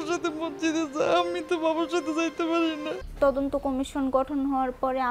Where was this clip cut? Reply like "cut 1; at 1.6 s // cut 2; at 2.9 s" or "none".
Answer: cut 1; at 3.0 s

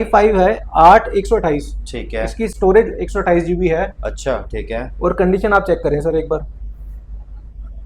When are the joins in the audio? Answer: none

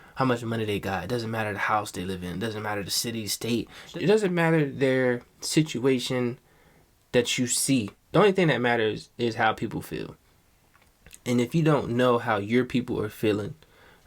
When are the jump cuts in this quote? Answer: cut 1; at 3.9 s // cut 2; at 8.0 s

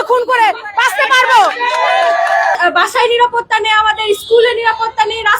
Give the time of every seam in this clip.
cut 1; at 2.5 s

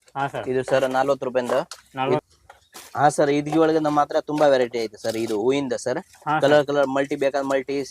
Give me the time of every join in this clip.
cut 1; at 2.2 s

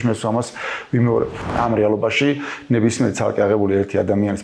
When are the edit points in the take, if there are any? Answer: cut 1; at 1.5 s

